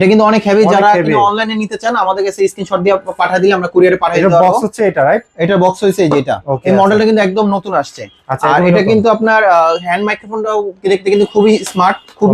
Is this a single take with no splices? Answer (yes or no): yes